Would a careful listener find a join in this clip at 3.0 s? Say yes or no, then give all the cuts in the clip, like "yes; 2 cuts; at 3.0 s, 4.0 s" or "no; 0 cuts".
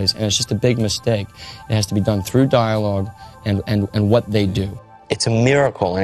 no; 1 cut; at 4.8 s